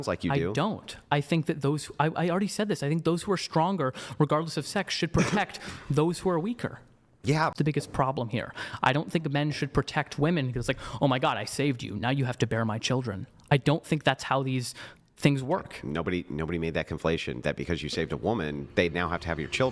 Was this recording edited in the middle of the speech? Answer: yes; 1 cut; at 7.5 s

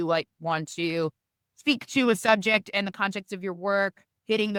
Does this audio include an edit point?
no; 0 cuts

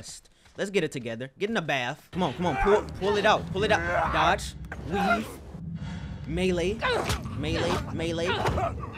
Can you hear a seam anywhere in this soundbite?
yes; 1 cut; at 2.0 s

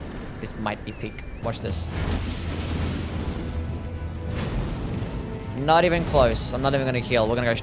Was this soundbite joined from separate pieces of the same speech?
yes; 1 cut; at 1.4 s

